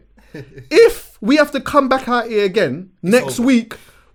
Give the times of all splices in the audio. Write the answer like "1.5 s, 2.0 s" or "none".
none